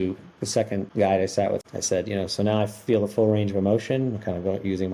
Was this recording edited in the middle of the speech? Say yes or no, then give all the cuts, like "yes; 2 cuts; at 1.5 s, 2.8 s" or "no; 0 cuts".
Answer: yes; 2 cuts; at 0.9 s, 1.6 s